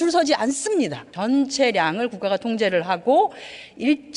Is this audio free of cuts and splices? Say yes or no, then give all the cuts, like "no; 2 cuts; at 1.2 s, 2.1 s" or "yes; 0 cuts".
no; 1 cut; at 1.1 s